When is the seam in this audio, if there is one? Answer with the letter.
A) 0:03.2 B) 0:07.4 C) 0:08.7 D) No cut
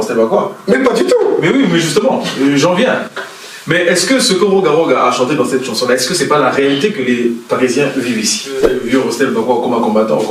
C